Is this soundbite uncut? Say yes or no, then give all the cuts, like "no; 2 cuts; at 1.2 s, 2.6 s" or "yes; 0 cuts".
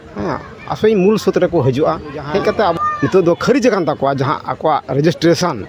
no; 1 cut; at 2.7 s